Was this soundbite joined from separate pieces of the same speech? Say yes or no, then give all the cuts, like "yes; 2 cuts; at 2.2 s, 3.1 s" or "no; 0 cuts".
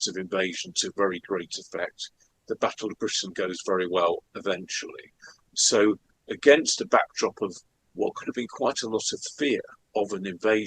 yes; 1 cut; at 9.8 s